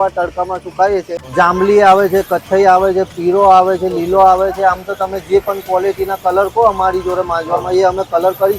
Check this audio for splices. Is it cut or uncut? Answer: cut